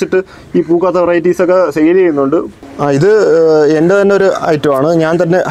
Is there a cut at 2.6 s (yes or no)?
yes